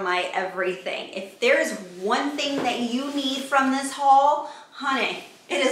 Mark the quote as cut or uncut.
uncut